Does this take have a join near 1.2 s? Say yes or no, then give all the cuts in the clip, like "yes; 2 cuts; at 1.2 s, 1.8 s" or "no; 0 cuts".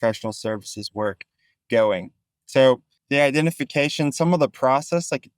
no; 1 cut; at 2.9 s